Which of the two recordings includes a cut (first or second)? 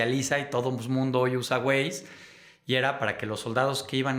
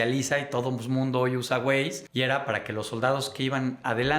second